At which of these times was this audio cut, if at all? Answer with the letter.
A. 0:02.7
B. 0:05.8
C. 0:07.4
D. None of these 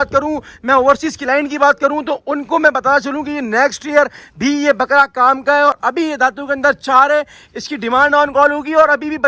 D